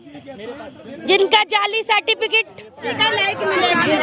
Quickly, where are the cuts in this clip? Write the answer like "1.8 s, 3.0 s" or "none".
2.9 s